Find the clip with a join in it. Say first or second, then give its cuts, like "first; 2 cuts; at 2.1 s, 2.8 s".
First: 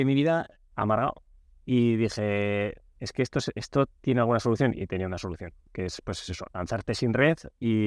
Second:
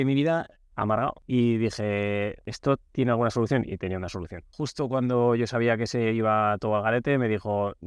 second; 3 cuts; at 1.2 s, 2.5 s, 4.6 s